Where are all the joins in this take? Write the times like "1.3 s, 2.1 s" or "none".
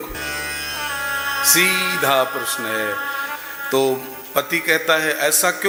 none

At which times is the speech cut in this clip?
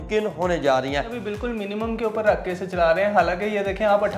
1.1 s

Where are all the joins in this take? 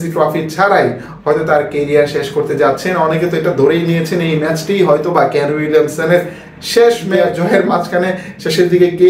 7.2 s

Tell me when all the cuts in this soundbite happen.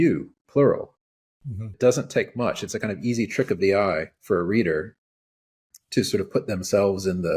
1.7 s

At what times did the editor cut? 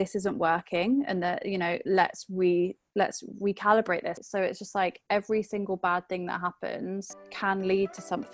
4.2 s, 7.2 s

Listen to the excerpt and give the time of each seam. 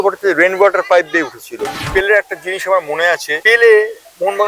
1.8 s, 3.3 s

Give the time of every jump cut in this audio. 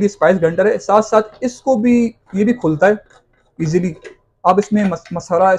none

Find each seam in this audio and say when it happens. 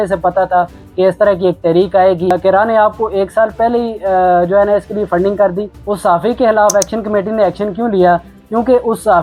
none

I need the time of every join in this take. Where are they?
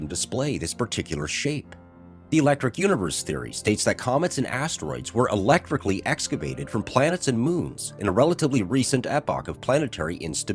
7.2 s

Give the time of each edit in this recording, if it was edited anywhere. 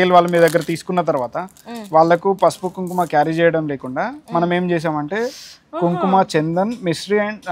none

